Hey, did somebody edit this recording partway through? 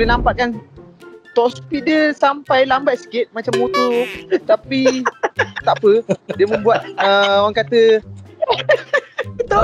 no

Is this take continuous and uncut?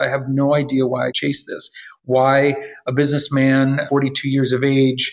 no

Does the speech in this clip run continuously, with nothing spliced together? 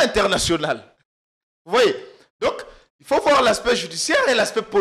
yes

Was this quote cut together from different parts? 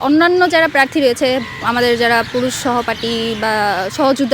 no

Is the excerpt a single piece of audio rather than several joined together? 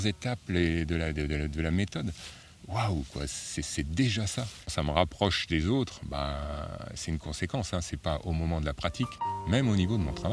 no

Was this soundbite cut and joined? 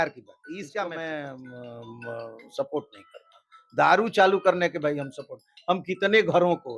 yes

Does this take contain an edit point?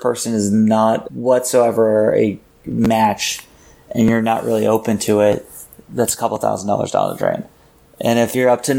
no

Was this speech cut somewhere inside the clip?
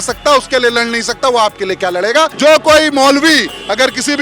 yes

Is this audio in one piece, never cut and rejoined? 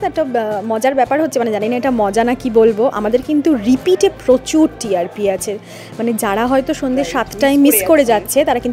yes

